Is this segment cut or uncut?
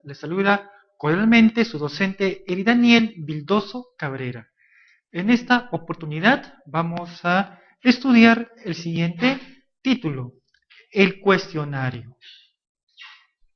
uncut